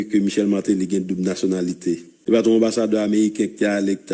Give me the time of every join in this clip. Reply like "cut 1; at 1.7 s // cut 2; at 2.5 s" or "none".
cut 1; at 2.2 s